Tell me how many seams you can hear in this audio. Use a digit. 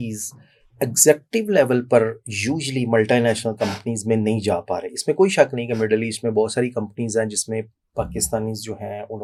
0